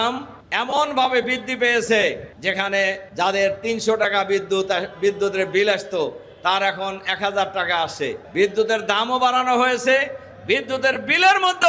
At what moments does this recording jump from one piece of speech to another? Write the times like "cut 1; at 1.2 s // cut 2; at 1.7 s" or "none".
none